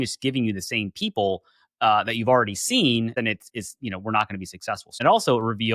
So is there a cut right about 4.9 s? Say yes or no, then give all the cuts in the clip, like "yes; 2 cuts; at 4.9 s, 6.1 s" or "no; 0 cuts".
yes; 2 cuts; at 3.1 s, 4.9 s